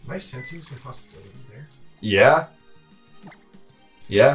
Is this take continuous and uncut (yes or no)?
yes